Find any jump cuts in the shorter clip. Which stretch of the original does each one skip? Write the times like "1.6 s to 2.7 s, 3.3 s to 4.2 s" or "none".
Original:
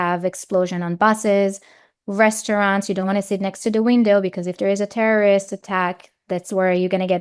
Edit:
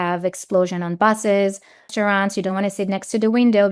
1.9 s to 2.4 s